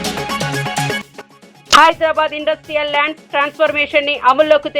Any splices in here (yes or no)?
yes